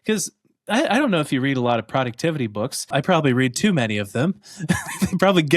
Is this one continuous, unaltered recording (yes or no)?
no